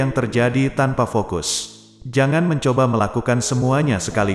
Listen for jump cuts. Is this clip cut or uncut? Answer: uncut